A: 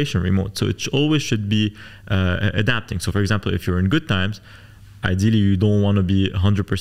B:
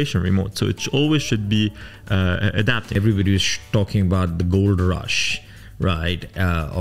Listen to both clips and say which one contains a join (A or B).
B